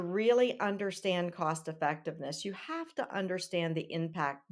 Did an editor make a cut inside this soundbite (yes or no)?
no